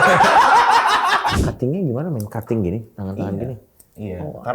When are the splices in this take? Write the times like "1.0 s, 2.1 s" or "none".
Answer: 1.4 s